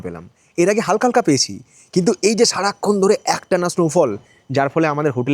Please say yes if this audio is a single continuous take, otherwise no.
yes